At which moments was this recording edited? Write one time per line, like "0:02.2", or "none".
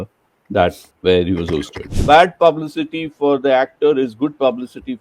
0:00.9
0:01.9